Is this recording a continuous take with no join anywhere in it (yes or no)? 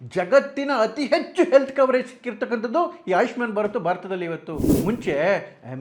no